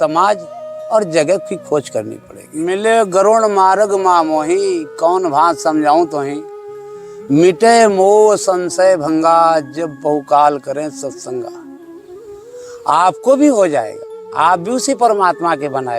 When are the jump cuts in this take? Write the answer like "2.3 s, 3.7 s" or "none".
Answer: 2.6 s, 11.5 s, 12.8 s